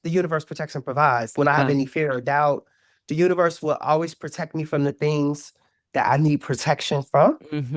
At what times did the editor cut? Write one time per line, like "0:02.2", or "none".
0:01.3

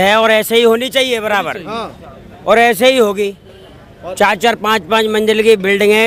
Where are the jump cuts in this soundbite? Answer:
none

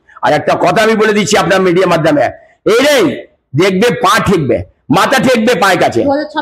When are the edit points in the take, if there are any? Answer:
none

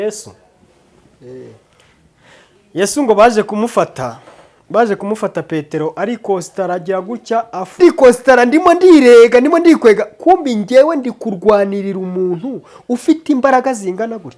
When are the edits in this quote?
0:07.7

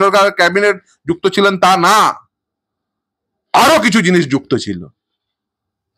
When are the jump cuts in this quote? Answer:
none

